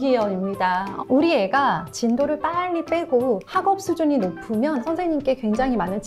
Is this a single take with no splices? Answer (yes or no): no